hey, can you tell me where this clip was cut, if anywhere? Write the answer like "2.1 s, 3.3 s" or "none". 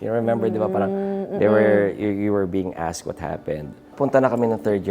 3.8 s